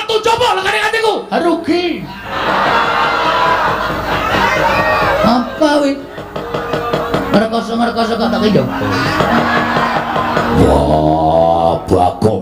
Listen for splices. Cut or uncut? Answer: cut